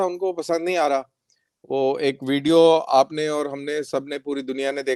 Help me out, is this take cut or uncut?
uncut